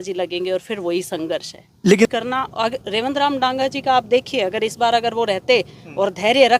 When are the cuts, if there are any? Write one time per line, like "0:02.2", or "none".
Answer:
0:02.1